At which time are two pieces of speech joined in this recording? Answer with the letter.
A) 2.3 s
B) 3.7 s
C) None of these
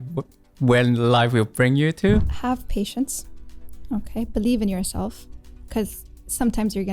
A